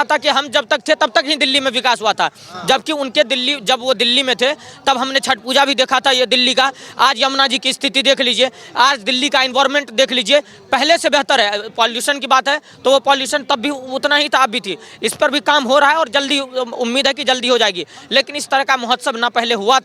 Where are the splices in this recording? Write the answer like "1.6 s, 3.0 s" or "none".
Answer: none